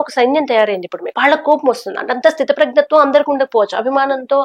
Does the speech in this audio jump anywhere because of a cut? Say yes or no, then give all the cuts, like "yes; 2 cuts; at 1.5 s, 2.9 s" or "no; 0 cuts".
yes; 1 cut; at 1.0 s